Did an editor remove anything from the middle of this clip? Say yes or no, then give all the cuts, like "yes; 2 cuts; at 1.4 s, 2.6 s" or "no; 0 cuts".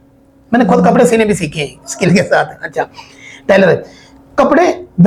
no; 0 cuts